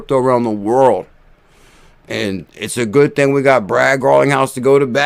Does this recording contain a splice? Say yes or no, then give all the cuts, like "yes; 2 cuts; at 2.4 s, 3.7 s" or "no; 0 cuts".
no; 0 cuts